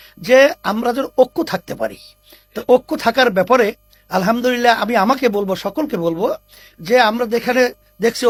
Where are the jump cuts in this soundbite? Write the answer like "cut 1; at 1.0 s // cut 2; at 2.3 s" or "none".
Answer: none